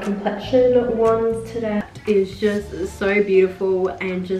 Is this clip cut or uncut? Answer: cut